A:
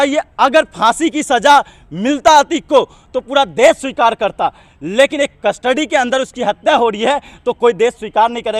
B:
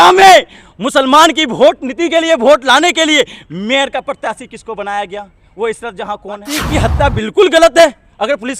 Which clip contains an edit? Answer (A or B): B